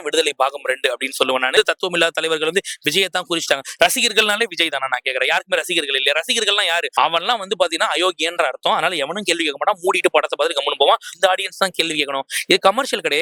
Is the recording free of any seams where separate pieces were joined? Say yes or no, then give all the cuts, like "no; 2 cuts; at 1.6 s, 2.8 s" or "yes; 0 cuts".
no; 3 cuts; at 1.5 s, 6.9 s, 11.1 s